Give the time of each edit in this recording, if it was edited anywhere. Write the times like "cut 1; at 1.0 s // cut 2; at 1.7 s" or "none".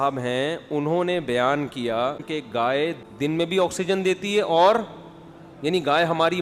cut 1; at 2.2 s // cut 2; at 3.0 s